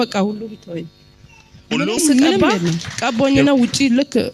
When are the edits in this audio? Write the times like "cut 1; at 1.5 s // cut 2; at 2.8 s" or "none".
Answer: cut 1; at 2.9 s

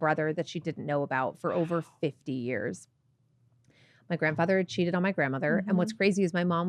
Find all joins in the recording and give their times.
none

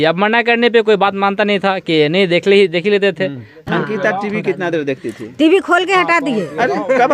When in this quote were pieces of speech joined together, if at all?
cut 1; at 3.6 s

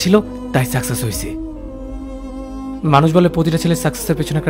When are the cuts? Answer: cut 1; at 2.8 s

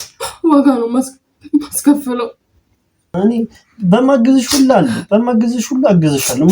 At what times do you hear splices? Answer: cut 1; at 3.1 s

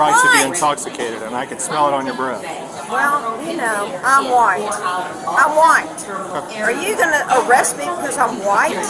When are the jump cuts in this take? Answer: none

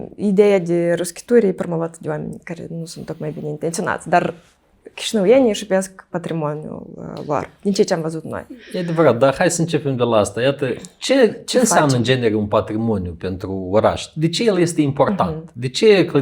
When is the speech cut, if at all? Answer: none

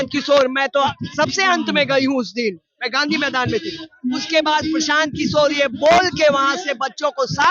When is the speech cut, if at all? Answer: none

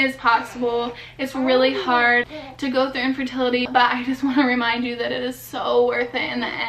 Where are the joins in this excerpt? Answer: cut 1; at 2.3 s // cut 2; at 3.7 s

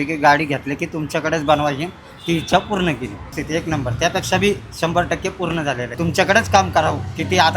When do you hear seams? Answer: cut 1; at 3.4 s // cut 2; at 5.9 s

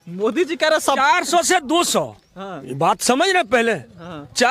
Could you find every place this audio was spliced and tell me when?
none

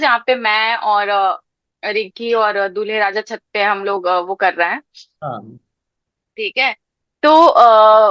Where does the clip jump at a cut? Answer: none

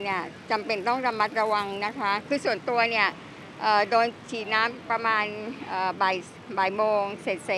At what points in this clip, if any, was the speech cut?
cut 1; at 2.2 s

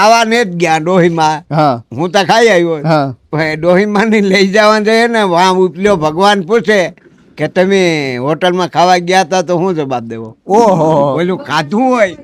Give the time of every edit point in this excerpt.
none

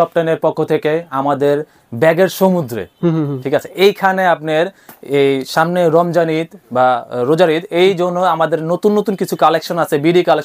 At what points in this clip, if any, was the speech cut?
none

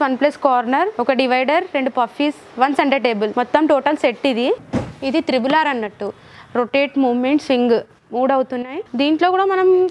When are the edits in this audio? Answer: cut 1; at 1.0 s // cut 2; at 3.3 s // cut 3; at 4.6 s // cut 4; at 8.8 s

